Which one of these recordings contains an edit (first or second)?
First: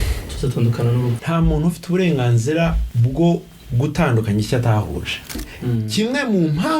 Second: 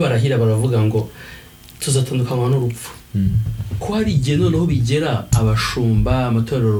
first